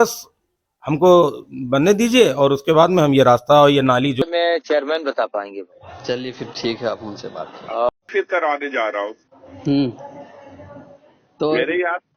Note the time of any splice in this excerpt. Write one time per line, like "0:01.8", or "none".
0:04.2
0:08.1

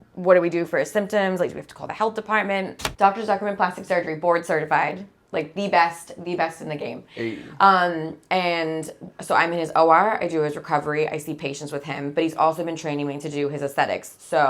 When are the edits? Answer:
0:02.8

